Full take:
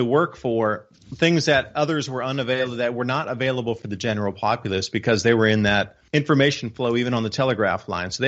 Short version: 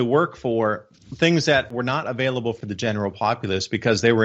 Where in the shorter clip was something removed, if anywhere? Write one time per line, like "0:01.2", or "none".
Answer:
0:01.7

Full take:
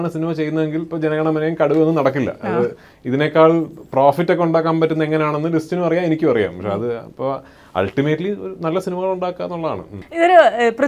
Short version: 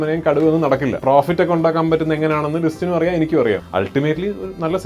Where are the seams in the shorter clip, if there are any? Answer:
0:01.0
0:03.6

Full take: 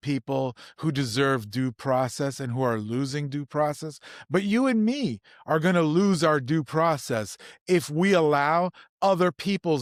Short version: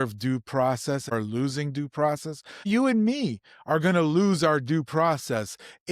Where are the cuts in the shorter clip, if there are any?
0:01.1
0:02.6

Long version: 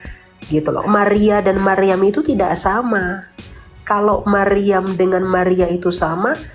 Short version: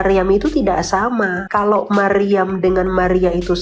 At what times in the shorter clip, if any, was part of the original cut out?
0:01.4

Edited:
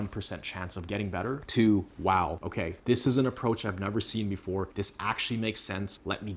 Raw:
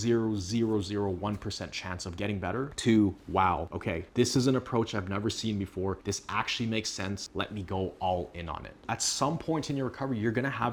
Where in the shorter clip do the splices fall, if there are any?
none

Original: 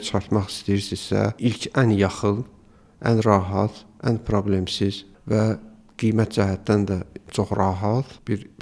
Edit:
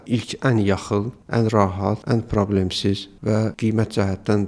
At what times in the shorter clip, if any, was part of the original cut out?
0:01.2
0:02.0
0:03.2

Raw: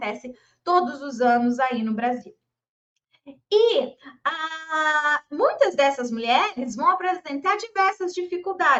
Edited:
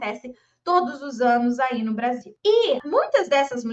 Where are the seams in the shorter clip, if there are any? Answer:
0:02.3
0:02.8

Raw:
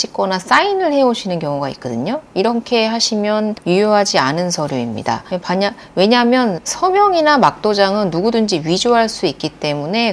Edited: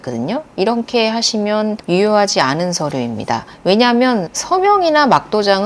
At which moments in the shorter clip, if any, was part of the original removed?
0:03.5

